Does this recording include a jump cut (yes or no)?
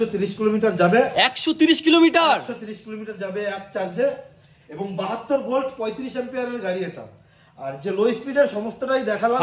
no